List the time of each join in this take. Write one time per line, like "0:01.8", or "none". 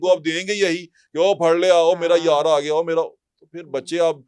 none